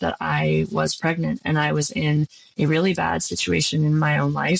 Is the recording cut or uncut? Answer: cut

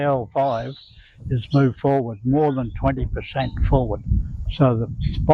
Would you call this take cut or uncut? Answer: uncut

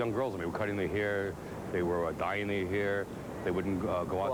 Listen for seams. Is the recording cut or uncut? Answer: uncut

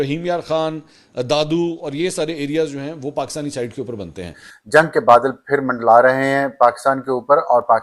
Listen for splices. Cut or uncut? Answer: cut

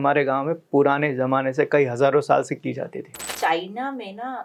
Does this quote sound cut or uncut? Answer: cut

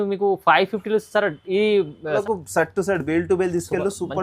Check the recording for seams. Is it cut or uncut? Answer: cut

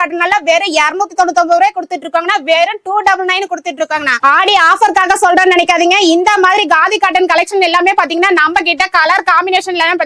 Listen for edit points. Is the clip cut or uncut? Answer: cut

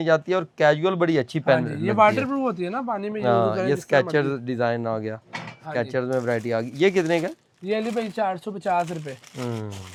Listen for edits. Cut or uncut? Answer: uncut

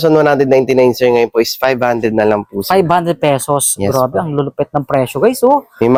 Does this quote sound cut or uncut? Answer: uncut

